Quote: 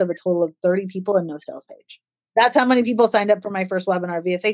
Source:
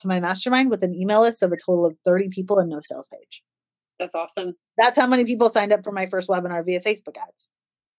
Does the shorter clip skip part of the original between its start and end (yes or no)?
yes